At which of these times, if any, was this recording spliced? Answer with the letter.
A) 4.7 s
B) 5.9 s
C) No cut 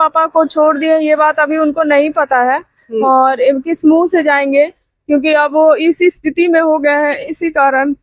C